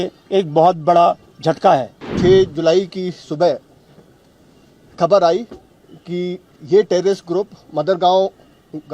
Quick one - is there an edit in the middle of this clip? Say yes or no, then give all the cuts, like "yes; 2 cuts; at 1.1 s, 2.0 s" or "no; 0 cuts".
yes; 1 cut; at 2.0 s